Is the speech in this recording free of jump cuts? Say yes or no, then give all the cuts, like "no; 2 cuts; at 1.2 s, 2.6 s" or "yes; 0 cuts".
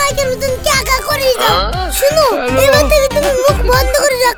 yes; 0 cuts